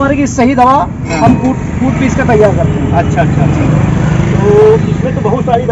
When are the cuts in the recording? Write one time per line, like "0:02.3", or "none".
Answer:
none